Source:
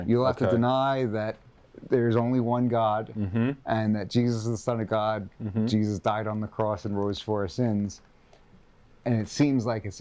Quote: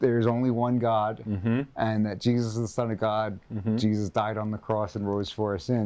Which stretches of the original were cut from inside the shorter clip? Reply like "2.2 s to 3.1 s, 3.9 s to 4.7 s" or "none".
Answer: none